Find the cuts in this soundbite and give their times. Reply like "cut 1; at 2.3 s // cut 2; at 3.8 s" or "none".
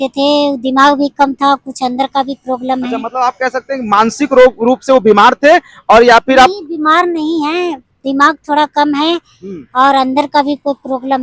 none